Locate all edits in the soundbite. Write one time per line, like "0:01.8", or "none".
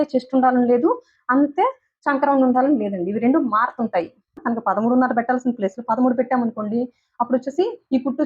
0:04.4